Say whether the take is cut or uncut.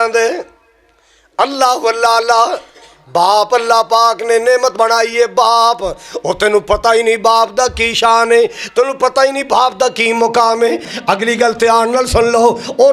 cut